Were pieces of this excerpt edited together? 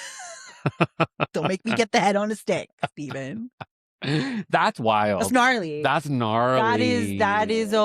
no; 0 cuts

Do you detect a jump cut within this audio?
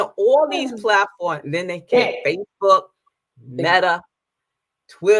no; 0 cuts

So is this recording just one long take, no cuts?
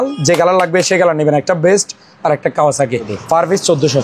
no; 1 cut; at 3.1 s

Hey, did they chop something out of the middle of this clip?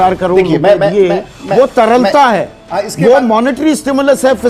no; 0 cuts

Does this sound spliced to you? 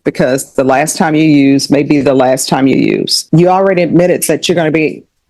yes; 1 cut; at 3.1 s

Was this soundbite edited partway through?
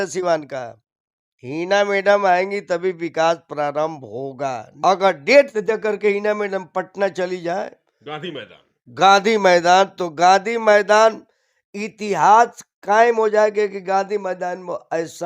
yes; 1 cut; at 4.7 s

